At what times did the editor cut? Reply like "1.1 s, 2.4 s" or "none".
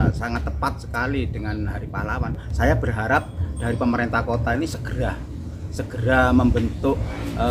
none